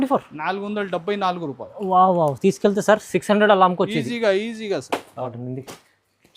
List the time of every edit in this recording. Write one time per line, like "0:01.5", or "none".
0:05.2